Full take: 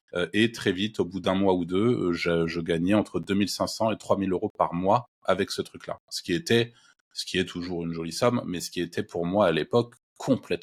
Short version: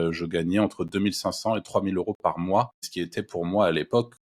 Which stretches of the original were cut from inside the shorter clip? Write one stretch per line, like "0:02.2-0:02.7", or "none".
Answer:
0:05.1-0:08.6